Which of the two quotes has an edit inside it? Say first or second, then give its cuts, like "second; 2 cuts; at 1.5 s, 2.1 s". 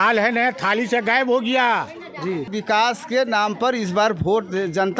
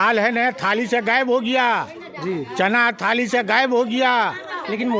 first; 1 cut; at 2.5 s